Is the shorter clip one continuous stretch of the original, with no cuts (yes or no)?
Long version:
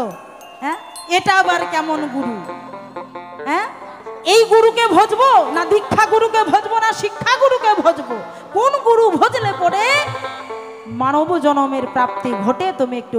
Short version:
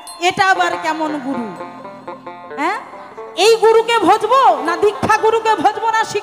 yes